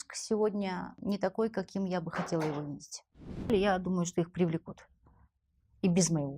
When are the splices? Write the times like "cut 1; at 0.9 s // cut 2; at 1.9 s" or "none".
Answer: cut 1; at 0.9 s // cut 2; at 3.5 s